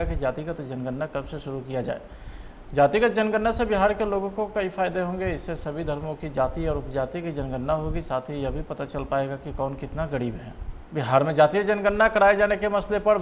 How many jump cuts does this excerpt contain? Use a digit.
1